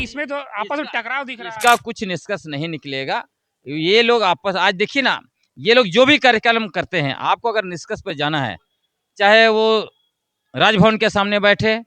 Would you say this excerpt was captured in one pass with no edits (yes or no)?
yes